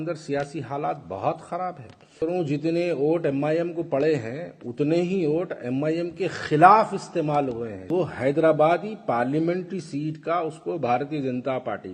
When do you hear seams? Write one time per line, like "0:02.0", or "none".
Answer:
0:02.2
0:07.9